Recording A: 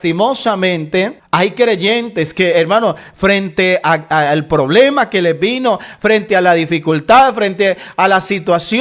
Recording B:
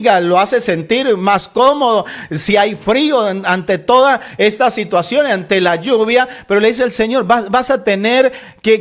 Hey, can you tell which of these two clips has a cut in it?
A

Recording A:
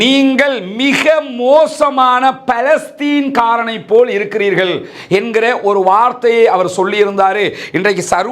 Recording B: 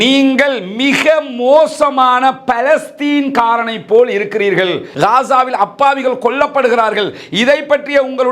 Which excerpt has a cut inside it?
B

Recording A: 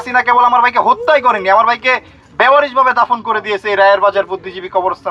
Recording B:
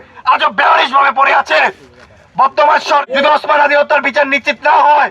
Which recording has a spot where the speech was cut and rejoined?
B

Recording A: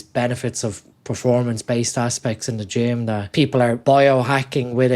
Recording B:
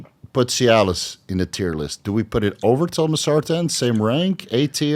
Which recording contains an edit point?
A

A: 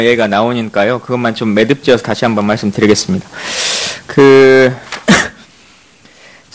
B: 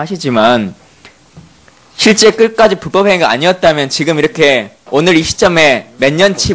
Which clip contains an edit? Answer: B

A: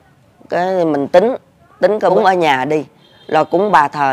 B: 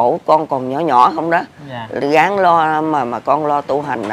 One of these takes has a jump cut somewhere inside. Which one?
A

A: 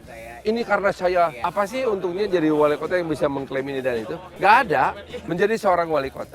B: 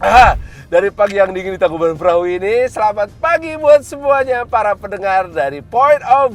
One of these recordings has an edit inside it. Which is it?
A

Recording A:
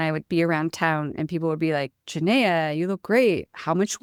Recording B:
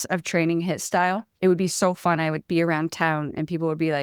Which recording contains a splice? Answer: B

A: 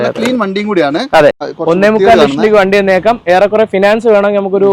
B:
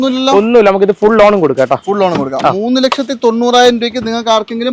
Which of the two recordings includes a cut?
A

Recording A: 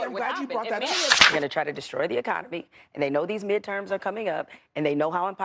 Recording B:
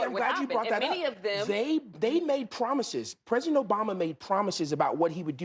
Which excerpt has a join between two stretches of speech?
A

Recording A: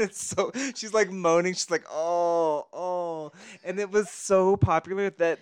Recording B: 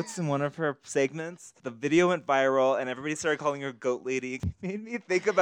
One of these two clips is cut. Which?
B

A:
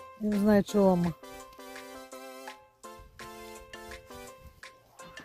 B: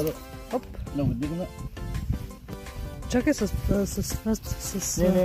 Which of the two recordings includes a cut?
A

